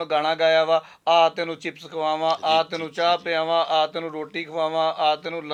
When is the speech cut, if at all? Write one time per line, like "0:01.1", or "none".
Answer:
none